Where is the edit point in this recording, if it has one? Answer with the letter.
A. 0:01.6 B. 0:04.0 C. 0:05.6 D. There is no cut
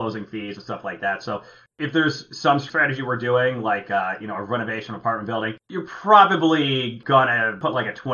A